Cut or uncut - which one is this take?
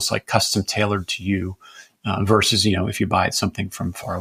uncut